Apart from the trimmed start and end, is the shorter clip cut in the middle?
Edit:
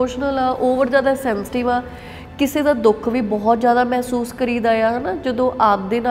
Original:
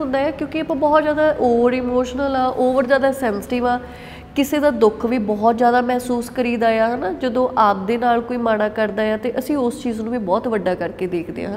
no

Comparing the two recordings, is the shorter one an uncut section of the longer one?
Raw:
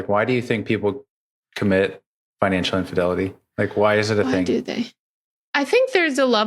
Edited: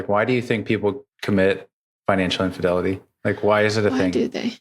no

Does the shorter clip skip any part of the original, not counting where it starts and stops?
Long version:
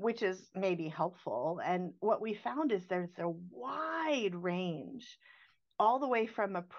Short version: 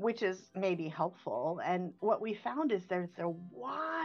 no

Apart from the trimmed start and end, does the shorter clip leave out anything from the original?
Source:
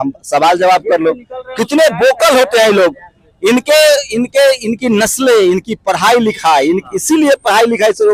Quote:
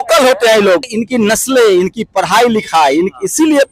yes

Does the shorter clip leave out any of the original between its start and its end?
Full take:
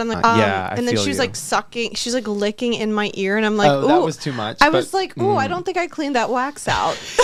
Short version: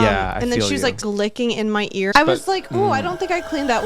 yes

